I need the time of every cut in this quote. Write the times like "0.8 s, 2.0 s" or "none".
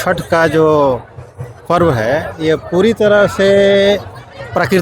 none